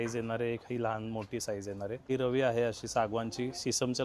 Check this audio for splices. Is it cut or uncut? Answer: cut